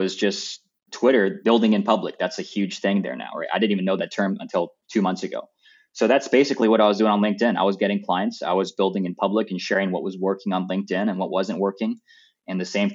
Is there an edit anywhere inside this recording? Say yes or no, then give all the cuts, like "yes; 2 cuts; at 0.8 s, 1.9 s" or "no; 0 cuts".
yes; 1 cut; at 1.4 s